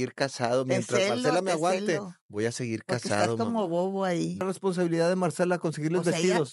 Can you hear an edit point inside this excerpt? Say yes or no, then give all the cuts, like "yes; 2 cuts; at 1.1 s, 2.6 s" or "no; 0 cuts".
yes; 1 cut; at 4.4 s